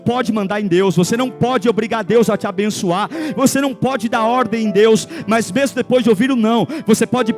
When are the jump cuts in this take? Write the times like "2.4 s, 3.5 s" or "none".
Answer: 1.0 s